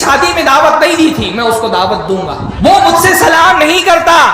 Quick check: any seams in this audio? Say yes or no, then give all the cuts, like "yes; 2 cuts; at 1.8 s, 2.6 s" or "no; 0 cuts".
yes; 1 cut; at 2.5 s